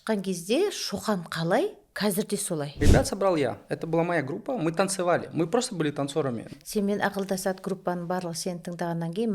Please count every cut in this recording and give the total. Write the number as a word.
three